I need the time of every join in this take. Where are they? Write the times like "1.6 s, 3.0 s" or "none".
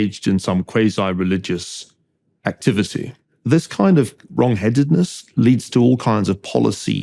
3.5 s